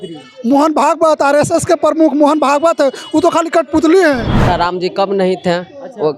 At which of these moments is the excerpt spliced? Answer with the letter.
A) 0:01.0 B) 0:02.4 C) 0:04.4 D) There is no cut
C